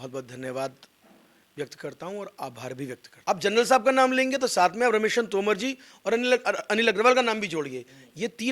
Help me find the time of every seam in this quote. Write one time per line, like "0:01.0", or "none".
0:03.0